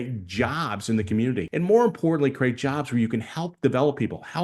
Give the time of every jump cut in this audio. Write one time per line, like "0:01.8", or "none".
0:01.5